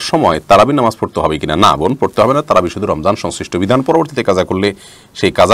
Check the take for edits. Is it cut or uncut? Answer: uncut